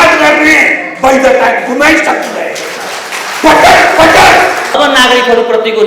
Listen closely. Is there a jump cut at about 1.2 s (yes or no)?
no